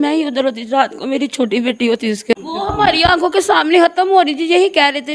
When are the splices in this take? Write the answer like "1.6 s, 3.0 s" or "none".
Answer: 2.3 s